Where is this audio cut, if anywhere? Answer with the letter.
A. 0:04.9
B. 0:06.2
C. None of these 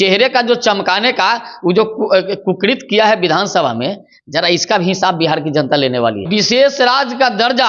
B